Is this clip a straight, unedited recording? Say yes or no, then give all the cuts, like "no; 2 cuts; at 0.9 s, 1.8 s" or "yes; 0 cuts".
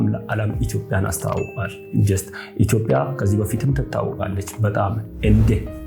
yes; 0 cuts